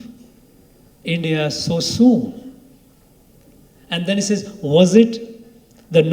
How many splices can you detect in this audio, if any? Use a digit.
0